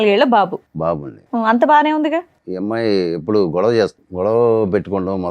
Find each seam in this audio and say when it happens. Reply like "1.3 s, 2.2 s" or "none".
2.4 s, 4.0 s